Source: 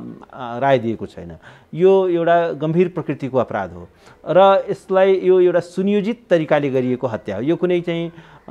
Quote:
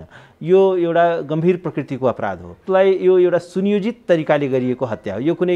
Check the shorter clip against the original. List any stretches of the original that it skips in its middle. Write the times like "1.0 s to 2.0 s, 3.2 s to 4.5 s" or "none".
3.9 s to 4.8 s

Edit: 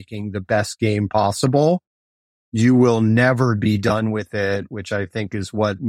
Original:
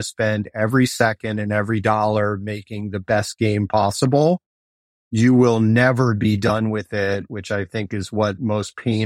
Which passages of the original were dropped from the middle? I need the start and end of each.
none

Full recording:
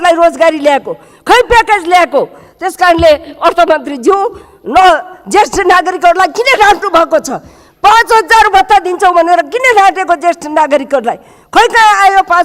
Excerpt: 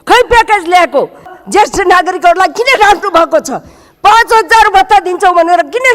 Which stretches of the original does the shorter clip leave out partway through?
2.5 s to 5.1 s

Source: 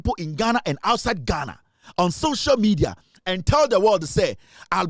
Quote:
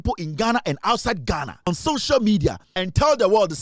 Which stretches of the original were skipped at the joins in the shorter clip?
1.7 s to 2.0 s, 3.1 s to 3.2 s

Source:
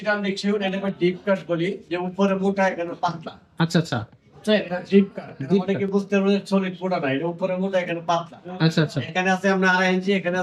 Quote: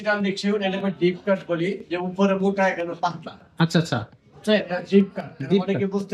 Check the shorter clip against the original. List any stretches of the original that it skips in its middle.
none

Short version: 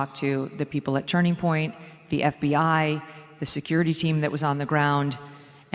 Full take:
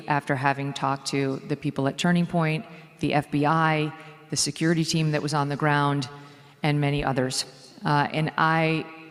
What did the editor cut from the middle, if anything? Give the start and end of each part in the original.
none

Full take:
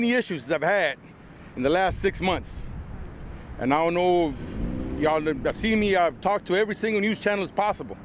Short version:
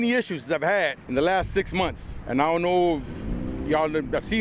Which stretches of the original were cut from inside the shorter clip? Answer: 1.0 s to 1.5 s, 2.6 s to 3.4 s

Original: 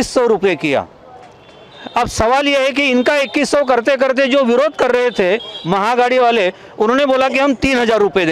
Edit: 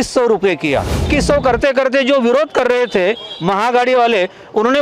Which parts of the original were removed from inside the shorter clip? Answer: 1.1 s to 3.3 s

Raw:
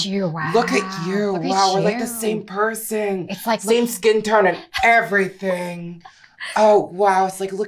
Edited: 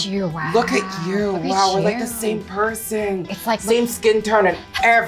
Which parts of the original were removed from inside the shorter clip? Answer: none

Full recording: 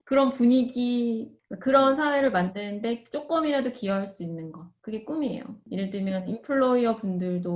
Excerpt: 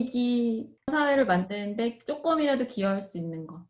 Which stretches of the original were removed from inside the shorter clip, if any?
1.5 s to 2.0 s

